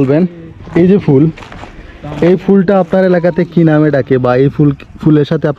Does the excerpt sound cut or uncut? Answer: uncut